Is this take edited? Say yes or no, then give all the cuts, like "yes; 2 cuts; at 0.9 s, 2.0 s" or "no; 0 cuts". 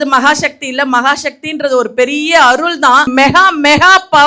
yes; 1 cut; at 3.1 s